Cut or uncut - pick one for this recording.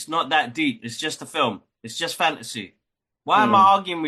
uncut